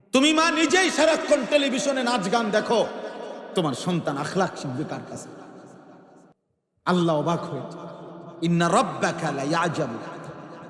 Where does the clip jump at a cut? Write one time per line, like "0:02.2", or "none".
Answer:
0:06.4